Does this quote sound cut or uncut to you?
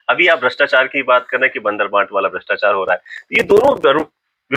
uncut